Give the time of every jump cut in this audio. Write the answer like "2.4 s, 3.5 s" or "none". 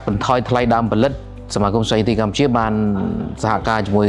none

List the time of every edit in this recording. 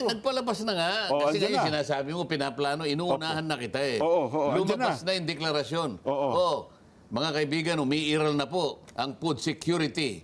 none

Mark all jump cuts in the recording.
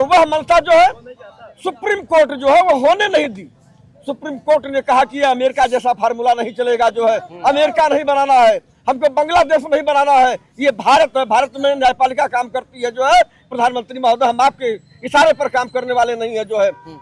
none

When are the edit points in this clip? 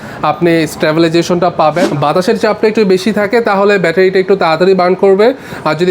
1.8 s

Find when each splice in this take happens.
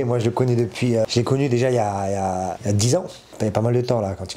1.1 s, 2.6 s, 3.2 s

